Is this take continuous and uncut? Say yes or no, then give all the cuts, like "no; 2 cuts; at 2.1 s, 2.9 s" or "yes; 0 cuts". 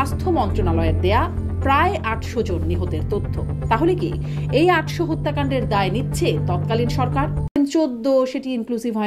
no; 1 cut; at 7.6 s